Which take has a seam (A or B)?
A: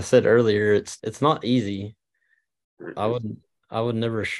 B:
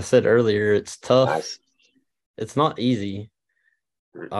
A